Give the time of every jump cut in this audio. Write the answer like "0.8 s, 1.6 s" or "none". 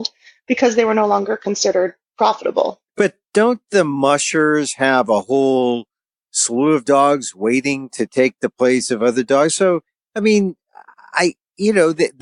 none